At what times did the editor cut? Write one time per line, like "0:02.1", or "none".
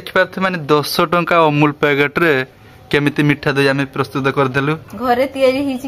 none

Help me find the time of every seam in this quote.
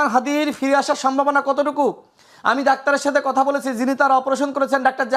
none

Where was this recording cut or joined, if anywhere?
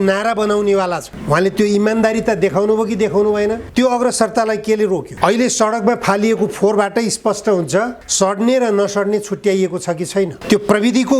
0:01.1
0:03.6
0:05.1
0:08.0
0:10.4

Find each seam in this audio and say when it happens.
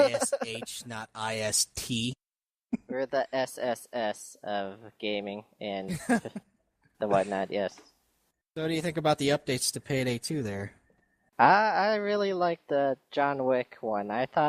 0:12.7

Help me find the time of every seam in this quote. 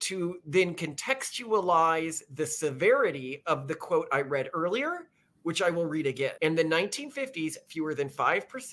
0:06.3

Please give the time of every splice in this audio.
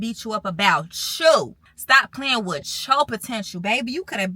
0:01.7

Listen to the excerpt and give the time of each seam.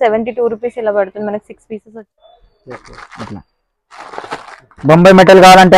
0:01.8

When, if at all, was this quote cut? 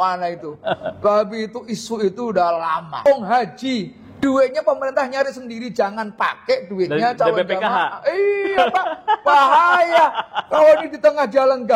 0:03.0

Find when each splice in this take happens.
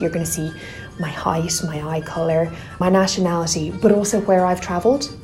0:02.6

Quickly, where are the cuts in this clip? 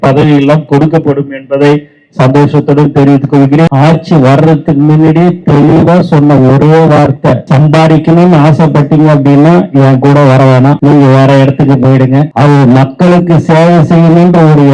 0:03.7
0:07.4
0:10.8
0:12.3

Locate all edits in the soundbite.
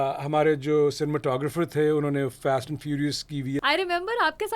0:03.6

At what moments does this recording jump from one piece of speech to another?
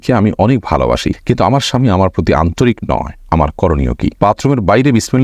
0:04.2

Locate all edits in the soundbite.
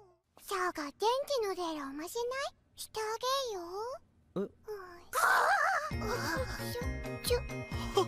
none

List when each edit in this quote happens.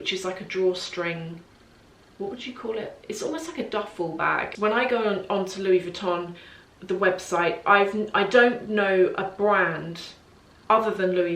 0:04.5

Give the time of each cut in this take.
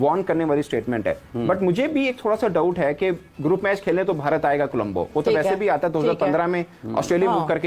none

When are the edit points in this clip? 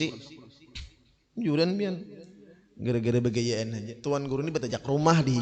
0:03.9

